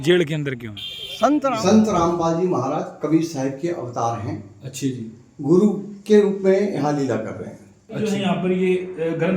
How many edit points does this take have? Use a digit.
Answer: 2